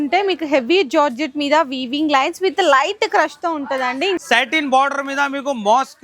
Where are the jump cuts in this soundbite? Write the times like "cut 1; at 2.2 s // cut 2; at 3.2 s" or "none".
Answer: cut 1; at 4.2 s